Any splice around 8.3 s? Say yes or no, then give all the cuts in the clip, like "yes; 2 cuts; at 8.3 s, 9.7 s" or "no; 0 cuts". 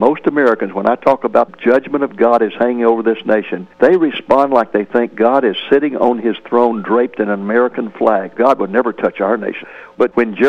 yes; 3 cuts; at 3.6 s, 8.3 s, 9.5 s